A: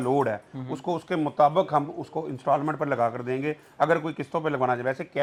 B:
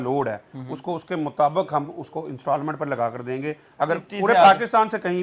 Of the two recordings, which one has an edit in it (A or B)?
B